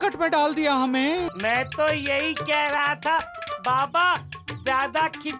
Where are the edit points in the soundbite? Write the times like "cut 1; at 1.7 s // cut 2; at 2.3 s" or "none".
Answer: cut 1; at 1.3 s